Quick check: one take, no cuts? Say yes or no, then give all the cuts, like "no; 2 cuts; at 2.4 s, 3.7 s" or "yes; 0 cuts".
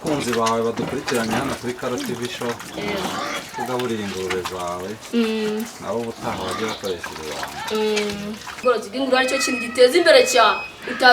no; 1 cut; at 8.5 s